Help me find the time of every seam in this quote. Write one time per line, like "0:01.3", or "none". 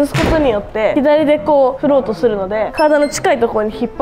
0:00.9
0:02.7